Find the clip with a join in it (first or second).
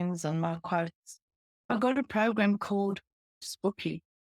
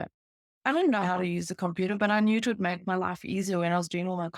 first